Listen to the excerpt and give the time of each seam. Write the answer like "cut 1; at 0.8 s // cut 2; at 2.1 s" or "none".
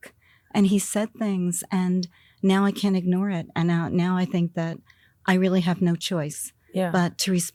none

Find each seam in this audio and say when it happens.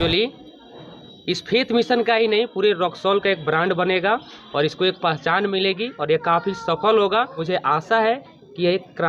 cut 1; at 7.4 s

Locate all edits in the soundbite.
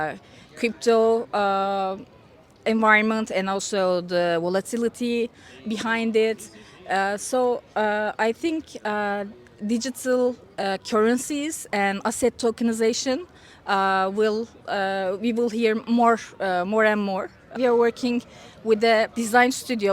cut 1; at 17.5 s // cut 2; at 19.1 s

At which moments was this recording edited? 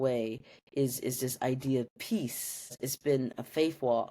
cut 1; at 2.9 s

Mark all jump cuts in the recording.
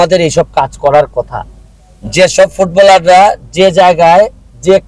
none

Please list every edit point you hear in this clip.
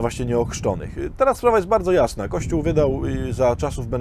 cut 1; at 2.3 s

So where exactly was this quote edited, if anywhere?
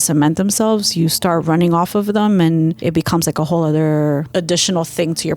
cut 1; at 2.8 s // cut 2; at 4.3 s

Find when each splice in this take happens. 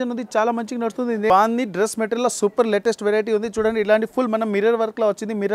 cut 1; at 1.3 s

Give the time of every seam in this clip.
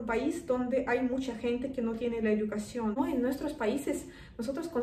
cut 1; at 3.0 s

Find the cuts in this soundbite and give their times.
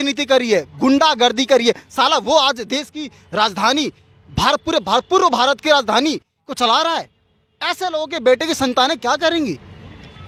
none

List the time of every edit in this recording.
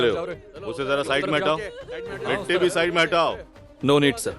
none

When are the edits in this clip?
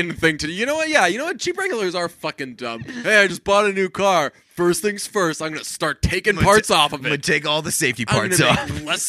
cut 1; at 2.9 s

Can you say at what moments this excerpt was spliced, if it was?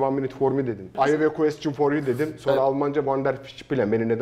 cut 1; at 0.9 s

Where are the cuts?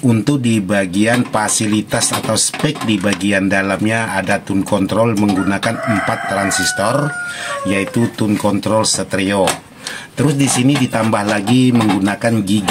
none

